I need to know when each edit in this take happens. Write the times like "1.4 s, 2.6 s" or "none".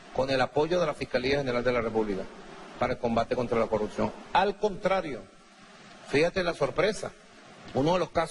4.2 s